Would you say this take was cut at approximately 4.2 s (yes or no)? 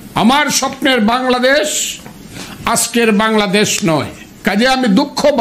yes